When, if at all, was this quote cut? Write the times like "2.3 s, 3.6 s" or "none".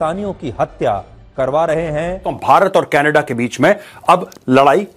2.4 s